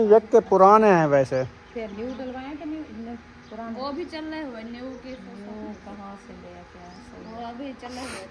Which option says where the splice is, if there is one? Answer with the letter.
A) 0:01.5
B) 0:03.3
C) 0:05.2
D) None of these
D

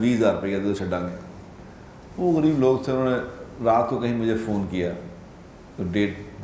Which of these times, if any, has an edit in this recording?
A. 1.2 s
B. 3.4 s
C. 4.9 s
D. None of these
D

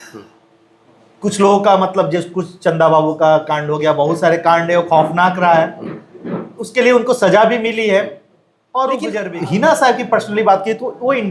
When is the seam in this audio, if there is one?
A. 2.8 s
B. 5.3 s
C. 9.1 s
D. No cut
C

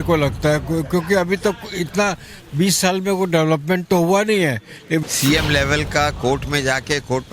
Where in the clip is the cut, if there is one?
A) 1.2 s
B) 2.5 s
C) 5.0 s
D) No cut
C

